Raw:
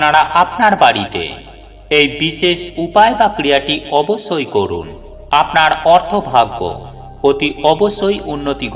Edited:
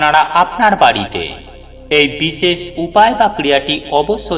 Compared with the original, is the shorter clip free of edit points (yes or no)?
yes